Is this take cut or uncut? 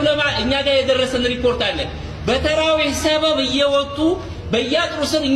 uncut